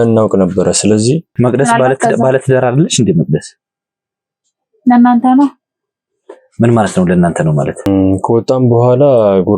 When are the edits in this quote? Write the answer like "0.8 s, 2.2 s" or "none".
1.3 s, 7.9 s